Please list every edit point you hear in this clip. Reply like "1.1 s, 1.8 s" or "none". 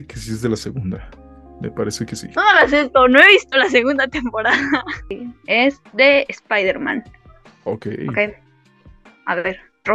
5.2 s